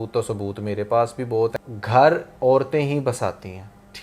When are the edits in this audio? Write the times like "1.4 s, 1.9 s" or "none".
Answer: 1.7 s